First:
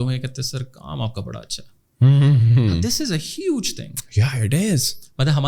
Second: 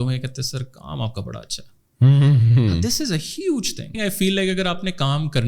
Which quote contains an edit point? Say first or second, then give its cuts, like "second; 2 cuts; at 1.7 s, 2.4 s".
second; 1 cut; at 3.9 s